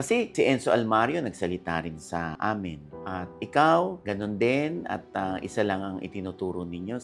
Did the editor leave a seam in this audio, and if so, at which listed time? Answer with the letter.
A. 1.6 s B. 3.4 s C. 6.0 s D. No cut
D